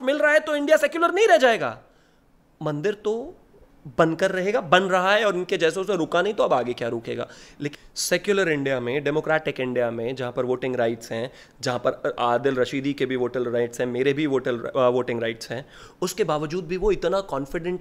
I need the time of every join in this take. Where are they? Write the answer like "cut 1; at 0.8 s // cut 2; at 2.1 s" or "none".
cut 1; at 7.7 s